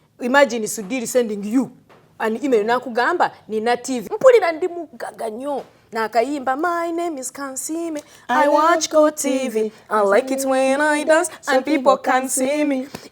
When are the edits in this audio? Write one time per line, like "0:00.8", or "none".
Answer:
0:04.1